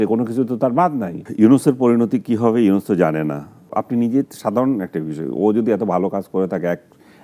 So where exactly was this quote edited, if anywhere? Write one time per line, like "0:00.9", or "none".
0:01.2
0:03.7